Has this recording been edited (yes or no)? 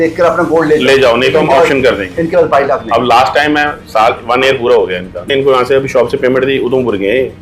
yes